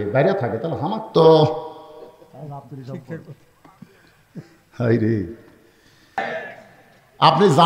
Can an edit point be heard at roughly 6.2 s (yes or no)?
yes